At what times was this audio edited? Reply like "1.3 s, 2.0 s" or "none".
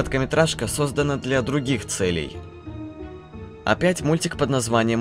3.3 s

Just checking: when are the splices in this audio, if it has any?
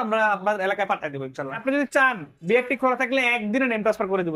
1.6 s

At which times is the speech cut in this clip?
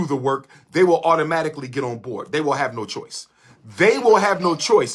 none

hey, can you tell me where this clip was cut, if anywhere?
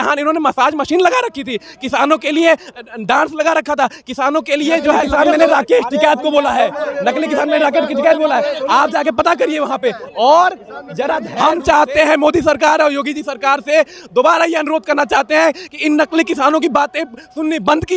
5.1 s, 11.3 s

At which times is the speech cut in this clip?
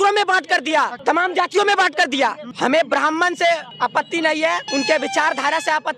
1.0 s, 2.5 s, 3.7 s, 4.6 s

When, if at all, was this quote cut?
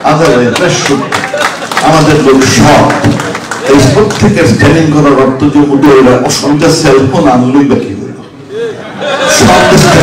6.4 s

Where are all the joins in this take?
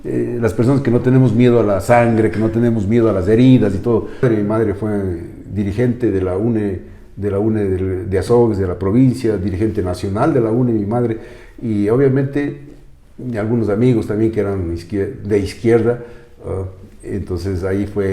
4.2 s

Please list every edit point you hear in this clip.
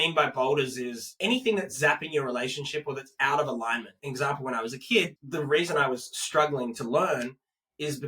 1.1 s, 3.9 s, 5.2 s

